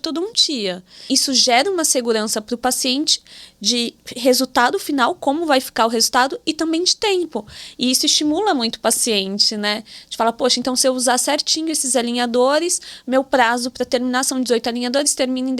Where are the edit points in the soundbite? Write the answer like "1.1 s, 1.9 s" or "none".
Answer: 1.0 s